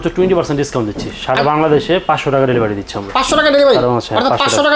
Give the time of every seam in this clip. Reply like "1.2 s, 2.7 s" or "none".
none